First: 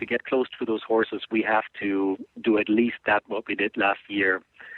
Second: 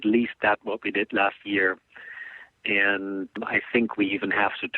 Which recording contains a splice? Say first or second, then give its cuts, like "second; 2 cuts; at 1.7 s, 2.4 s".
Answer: second; 1 cut; at 3.3 s